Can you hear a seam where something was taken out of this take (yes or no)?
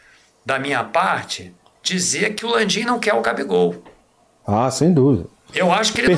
no